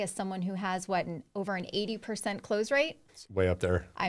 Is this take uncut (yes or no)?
yes